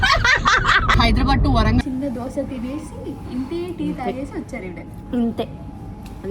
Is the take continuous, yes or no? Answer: no